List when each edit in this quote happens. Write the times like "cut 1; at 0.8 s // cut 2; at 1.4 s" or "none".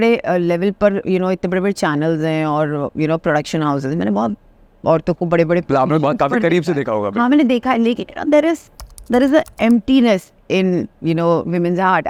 none

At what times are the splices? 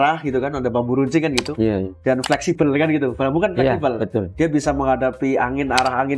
none

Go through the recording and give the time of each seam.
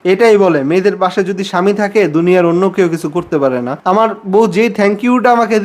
cut 1; at 3.7 s

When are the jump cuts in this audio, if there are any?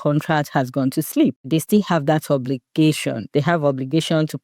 cut 1; at 1.5 s // cut 2; at 3.2 s

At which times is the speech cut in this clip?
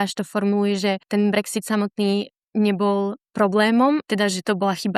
cut 1; at 1.0 s // cut 2; at 4.0 s

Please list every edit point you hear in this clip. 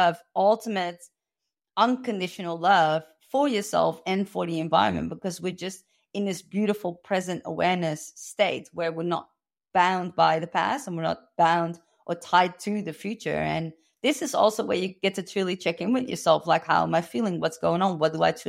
none

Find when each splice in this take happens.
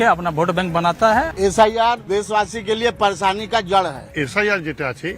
cut 1; at 1.3 s // cut 2; at 2.1 s // cut 3; at 4.2 s

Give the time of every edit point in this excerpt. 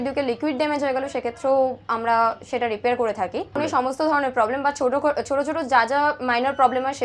cut 1; at 3.6 s

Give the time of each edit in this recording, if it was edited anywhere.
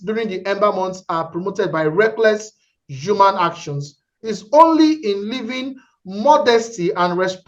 none

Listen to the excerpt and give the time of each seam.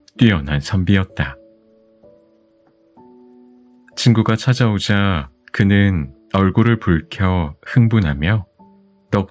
cut 1; at 1.3 s // cut 2; at 4.0 s

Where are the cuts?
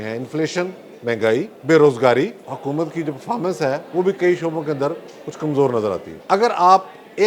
cut 1; at 1.5 s // cut 2; at 2.5 s // cut 3; at 6.1 s

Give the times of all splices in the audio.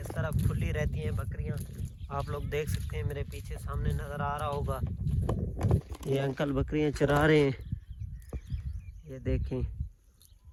none

